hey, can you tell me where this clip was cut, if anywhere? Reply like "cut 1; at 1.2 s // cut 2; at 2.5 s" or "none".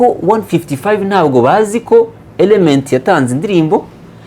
none

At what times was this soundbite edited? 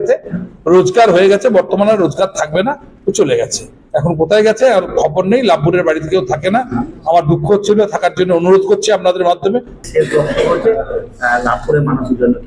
cut 1; at 9.8 s

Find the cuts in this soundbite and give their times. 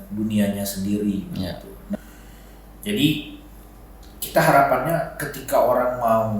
cut 1; at 2.0 s

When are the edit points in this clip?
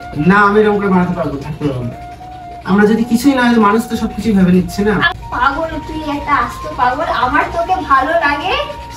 cut 1; at 5.1 s

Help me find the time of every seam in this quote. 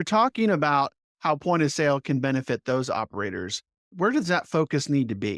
cut 1; at 3.9 s

